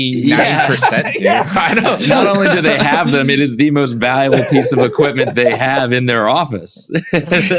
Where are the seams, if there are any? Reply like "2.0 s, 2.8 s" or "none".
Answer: none